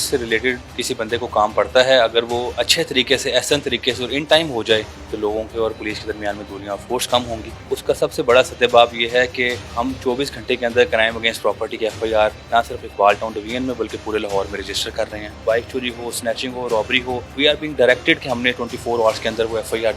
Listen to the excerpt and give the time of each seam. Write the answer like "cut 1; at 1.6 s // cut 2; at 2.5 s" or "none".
cut 1; at 5.0 s // cut 2; at 7.5 s // cut 3; at 9.7 s // cut 4; at 12.4 s // cut 5; at 15.4 s // cut 6; at 17.3 s